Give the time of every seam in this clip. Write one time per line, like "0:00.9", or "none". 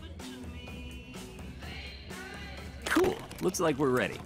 0:03.0